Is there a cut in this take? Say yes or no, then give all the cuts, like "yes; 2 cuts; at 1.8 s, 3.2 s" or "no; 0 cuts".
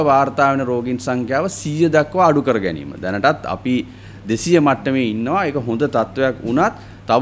no; 0 cuts